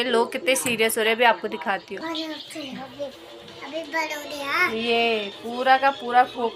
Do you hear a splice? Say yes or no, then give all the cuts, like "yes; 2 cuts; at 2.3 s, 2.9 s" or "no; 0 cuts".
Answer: no; 0 cuts